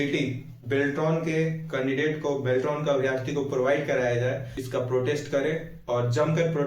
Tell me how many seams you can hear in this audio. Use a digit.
1